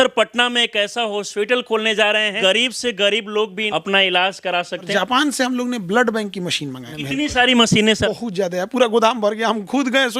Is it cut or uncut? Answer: cut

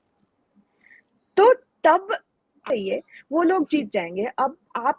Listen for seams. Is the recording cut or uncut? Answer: cut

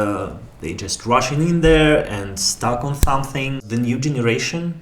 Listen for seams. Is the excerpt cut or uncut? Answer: cut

